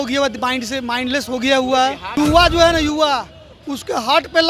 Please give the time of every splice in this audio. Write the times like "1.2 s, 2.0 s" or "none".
2.2 s

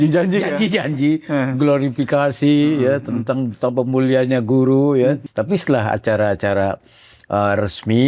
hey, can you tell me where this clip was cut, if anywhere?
5.2 s

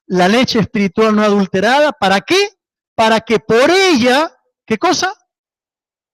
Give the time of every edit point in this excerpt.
4.4 s

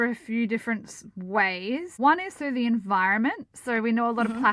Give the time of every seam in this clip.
1.9 s

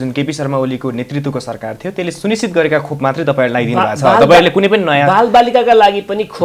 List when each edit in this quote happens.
none

